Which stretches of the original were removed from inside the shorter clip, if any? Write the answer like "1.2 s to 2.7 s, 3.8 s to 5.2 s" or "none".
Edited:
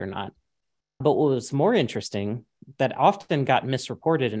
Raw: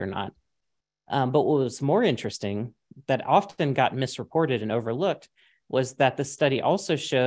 1.0 s to 1.3 s